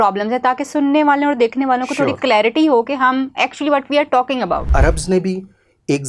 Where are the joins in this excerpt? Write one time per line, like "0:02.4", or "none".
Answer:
0:04.7